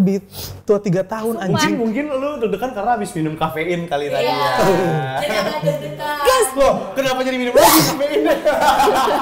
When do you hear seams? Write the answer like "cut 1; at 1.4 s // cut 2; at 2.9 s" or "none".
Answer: none